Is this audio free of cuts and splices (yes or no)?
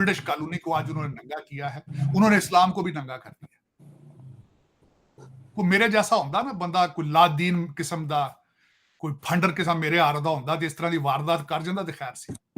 yes